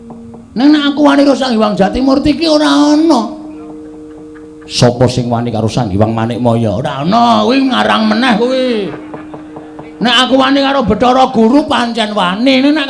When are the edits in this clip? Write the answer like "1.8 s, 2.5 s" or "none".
none